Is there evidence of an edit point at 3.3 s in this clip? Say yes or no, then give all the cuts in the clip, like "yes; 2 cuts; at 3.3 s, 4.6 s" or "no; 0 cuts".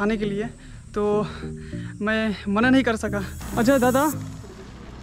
yes; 1 cut; at 3.3 s